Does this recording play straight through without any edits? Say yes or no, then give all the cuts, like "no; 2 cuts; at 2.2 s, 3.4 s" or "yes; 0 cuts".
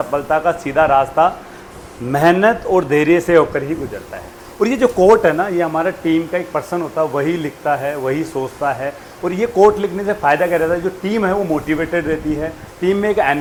yes; 0 cuts